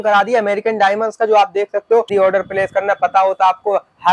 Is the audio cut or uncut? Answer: cut